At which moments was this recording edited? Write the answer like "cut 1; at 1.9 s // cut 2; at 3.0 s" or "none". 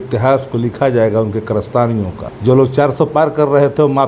cut 1; at 2.2 s